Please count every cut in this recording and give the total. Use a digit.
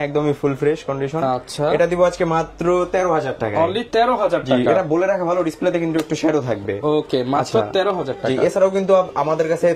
0